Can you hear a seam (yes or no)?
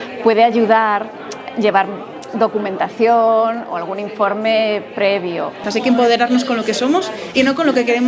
yes